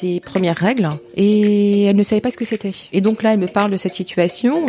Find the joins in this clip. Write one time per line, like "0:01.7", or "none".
0:01.0
0:02.8